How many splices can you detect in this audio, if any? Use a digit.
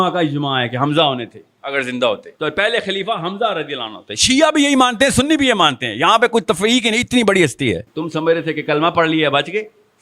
2